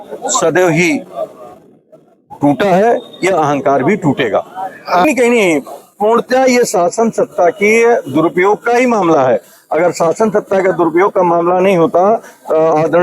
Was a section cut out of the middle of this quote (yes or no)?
yes